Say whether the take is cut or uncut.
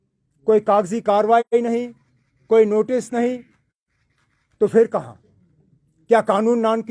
uncut